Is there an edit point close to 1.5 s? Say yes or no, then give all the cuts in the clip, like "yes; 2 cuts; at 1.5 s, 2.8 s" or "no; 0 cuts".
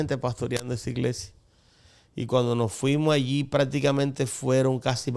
no; 0 cuts